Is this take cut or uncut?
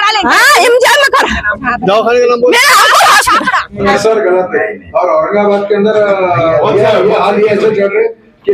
cut